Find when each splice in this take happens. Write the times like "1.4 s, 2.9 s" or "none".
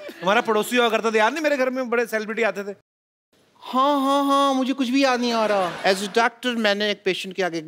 3.2 s, 5.8 s